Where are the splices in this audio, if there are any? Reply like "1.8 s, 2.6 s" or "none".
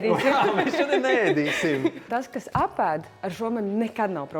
2.0 s